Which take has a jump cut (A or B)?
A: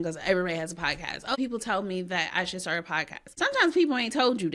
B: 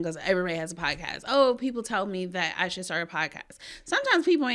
A